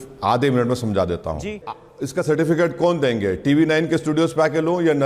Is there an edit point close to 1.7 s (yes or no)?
yes